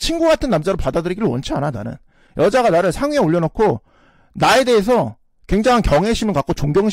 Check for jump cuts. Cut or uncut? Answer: uncut